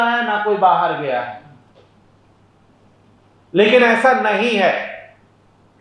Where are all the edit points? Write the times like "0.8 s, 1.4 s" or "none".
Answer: none